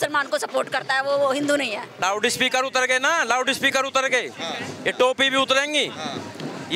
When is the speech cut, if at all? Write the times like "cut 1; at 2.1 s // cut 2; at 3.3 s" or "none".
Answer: cut 1; at 2.0 s